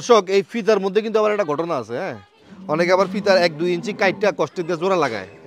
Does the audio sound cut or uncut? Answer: uncut